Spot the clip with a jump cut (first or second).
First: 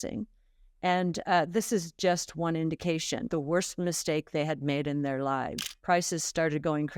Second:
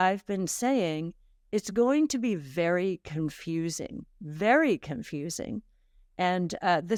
first